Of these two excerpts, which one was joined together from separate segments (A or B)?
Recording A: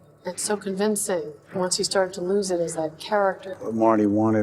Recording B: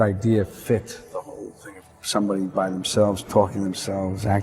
A